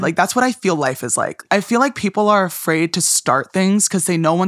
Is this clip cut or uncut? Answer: cut